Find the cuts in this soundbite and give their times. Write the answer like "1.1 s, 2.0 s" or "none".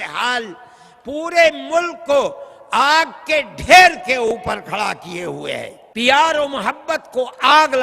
5.8 s

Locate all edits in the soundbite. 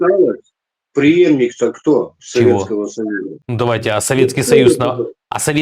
3.4 s

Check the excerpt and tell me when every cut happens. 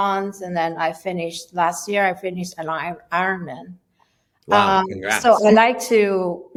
none

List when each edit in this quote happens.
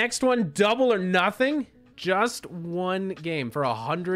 1.8 s

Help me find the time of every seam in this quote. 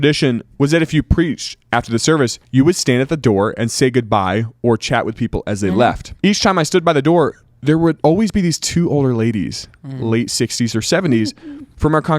2.4 s, 6.1 s, 8.0 s

